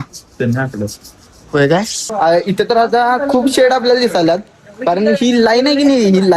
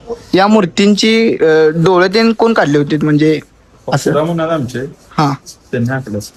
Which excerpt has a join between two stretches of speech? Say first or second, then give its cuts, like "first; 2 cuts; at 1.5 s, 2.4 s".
first; 1 cut; at 2.3 s